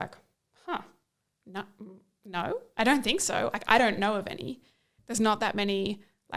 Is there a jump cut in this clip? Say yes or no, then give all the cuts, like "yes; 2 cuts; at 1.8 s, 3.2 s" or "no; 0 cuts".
yes; 1 cut; at 5.0 s